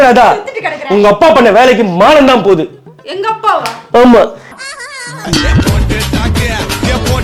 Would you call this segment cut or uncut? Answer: uncut